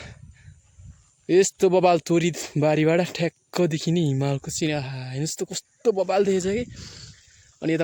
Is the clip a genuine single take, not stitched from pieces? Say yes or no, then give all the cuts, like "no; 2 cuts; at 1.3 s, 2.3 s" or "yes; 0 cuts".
yes; 0 cuts